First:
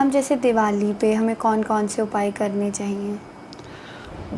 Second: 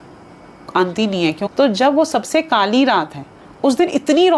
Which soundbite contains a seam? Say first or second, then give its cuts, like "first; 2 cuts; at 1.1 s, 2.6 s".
second; 1 cut; at 1.5 s